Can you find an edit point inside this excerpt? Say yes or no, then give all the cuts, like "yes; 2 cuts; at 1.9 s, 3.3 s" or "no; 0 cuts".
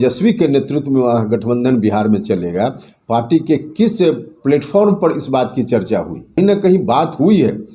yes; 1 cut; at 6.4 s